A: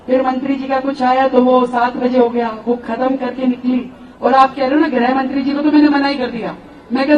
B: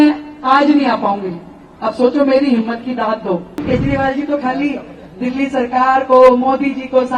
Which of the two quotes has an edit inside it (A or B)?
B